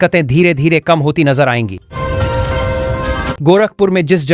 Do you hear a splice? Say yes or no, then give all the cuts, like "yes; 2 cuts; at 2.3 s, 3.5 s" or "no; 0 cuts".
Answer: yes; 2 cuts; at 1.9 s, 3.4 s